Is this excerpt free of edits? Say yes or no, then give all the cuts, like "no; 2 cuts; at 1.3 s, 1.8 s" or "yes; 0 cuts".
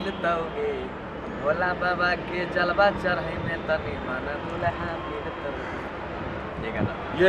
yes; 0 cuts